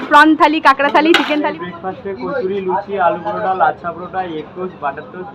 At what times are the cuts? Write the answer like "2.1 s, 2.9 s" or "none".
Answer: 1.5 s